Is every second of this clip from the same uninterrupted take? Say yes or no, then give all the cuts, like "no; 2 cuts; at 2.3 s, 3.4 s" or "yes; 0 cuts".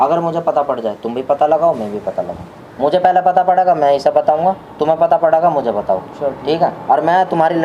yes; 0 cuts